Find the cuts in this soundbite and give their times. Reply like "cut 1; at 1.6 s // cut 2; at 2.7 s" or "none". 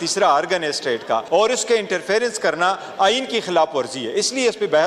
cut 1; at 1.2 s

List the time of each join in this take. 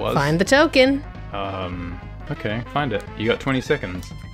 cut 1; at 2.2 s

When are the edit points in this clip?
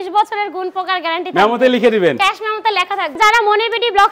cut 1; at 3.1 s

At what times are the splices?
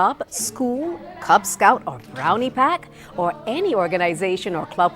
cut 1; at 3.3 s

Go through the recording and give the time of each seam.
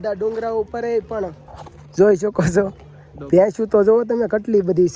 none

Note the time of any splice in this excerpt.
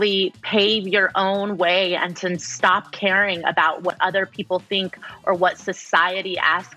none

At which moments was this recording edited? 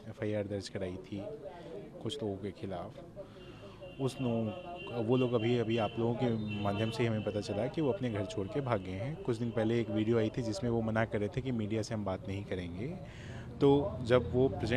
none

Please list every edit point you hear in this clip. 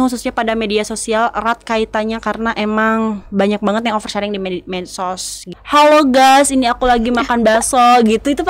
cut 1; at 5.6 s

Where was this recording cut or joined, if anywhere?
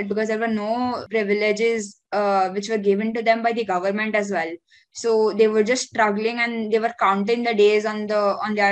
cut 1; at 1.0 s

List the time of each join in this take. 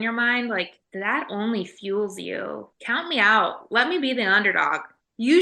cut 1; at 2.7 s

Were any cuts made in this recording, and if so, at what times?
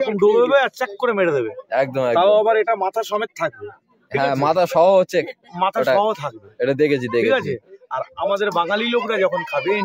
none

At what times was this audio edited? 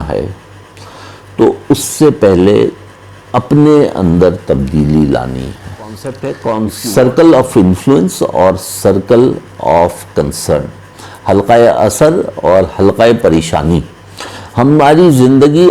cut 1; at 6.1 s

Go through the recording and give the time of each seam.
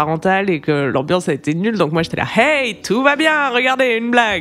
none

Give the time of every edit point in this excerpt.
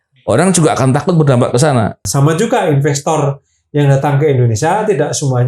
cut 1; at 2.1 s

